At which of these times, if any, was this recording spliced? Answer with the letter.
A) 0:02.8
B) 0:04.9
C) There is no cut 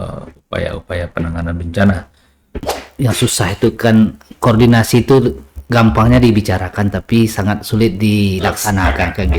A